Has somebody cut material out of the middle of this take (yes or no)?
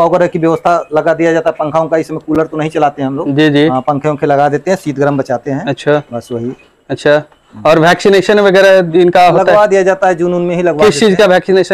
no